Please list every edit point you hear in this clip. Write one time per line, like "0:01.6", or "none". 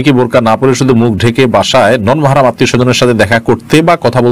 none